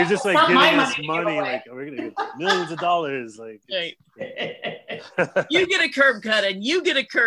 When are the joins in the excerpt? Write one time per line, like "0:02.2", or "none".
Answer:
none